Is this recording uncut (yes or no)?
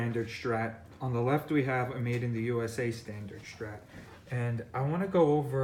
yes